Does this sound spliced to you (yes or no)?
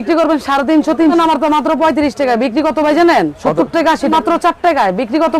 yes